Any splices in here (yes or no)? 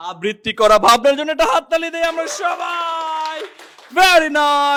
no